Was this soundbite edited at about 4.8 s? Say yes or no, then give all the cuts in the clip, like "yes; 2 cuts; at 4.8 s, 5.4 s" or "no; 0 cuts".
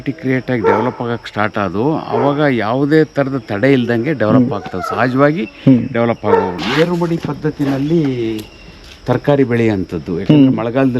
no; 1 cut; at 6.6 s